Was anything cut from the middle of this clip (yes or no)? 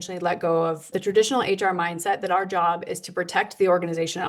yes